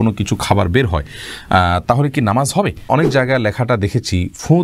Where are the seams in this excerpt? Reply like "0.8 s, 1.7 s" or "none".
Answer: 2.8 s